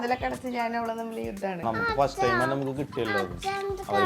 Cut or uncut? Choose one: cut